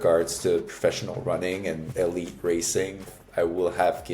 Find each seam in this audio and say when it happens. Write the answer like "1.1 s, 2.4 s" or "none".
1.8 s, 3.1 s